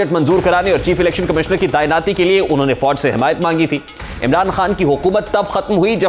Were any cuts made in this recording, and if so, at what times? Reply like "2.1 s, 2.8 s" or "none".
none